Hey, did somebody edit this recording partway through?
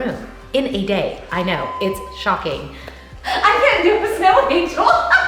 yes; 1 cut; at 3.2 s

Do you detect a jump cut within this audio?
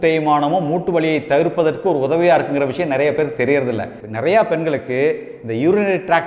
yes; 1 cut; at 4.0 s

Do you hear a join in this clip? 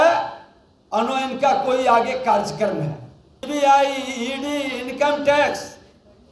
yes; 1 cut; at 3.3 s

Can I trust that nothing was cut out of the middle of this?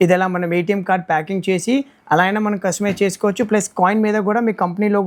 yes; 0 cuts

